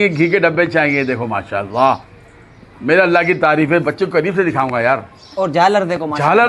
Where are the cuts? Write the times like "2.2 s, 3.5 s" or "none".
none